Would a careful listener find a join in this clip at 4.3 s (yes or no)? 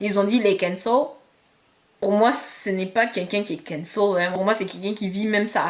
yes